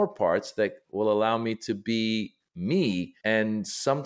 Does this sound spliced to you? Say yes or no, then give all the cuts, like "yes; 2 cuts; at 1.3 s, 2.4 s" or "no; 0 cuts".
yes; 1 cut; at 3.1 s